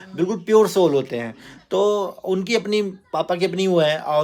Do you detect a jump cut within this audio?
no; 0 cuts

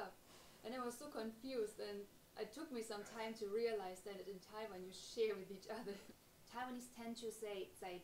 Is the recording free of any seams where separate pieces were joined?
no; 1 cut; at 6.1 s

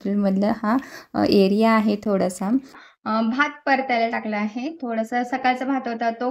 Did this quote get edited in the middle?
no; 0 cuts

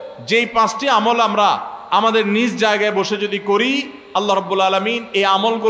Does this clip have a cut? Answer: no; 0 cuts

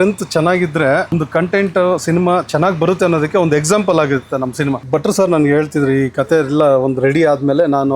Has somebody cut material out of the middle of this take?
yes; 2 cuts; at 1.1 s, 4.8 s

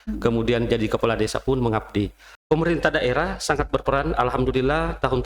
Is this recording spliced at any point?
yes; 1 cut; at 2.3 s

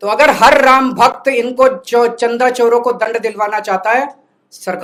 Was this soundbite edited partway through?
no; 0 cuts

